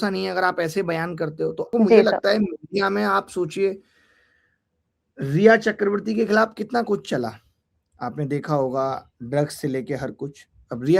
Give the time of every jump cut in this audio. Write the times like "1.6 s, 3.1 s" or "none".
1.7 s